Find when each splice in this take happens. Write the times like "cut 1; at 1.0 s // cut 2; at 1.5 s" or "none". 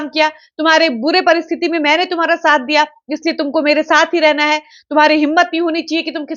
none